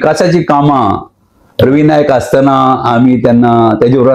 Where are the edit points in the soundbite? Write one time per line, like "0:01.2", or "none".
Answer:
none